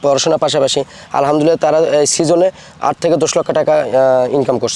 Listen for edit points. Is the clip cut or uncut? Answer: uncut